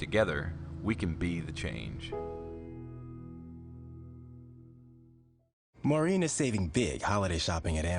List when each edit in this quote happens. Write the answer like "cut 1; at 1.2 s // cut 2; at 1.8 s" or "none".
cut 1; at 5.1 s